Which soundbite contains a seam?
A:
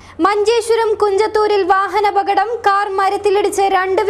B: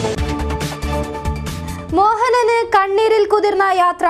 B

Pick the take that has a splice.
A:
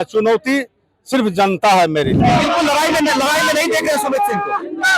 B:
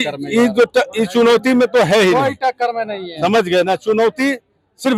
A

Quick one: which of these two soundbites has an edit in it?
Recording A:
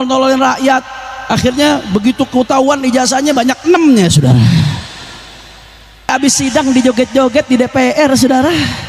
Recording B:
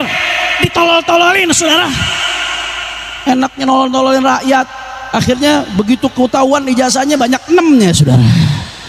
A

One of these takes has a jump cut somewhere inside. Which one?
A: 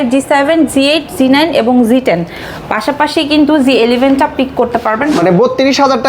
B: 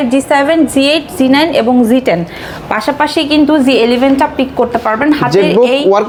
A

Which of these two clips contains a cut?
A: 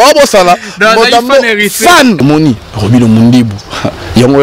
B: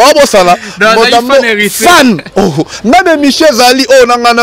A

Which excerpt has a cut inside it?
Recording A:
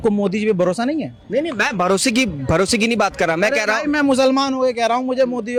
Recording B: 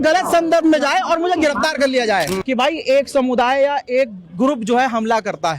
B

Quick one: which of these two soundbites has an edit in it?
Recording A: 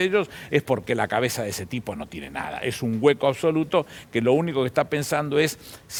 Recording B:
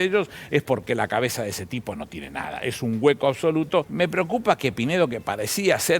B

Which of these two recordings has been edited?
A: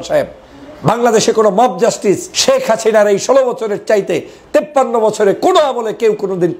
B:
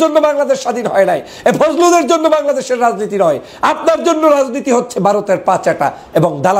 A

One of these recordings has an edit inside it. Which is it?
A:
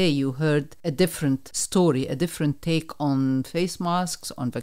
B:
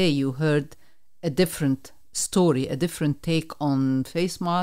A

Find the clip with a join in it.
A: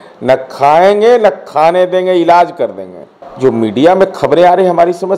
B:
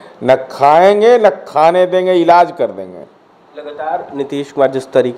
A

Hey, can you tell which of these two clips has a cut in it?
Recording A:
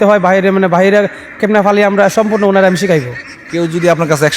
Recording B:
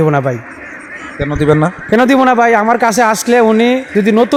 A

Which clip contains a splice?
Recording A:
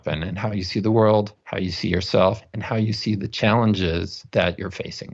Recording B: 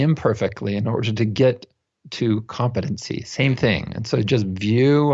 A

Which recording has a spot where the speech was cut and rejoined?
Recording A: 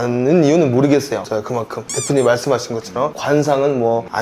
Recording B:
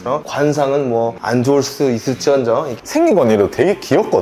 B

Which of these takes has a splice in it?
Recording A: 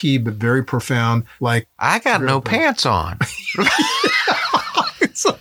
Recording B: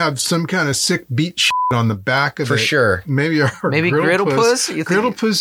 B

